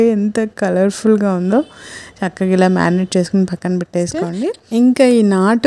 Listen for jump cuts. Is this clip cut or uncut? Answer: cut